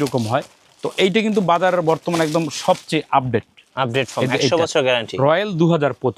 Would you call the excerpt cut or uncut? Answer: uncut